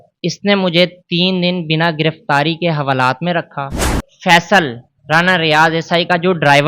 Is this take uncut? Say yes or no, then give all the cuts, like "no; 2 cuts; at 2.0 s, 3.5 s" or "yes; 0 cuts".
no; 1 cut; at 4.0 s